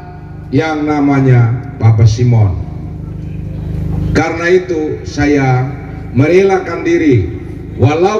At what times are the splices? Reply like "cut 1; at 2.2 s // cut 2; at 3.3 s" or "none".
none